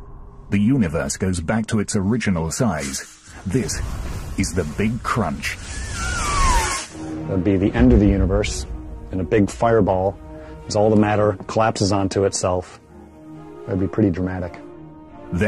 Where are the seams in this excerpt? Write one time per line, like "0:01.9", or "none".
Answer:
0:04.4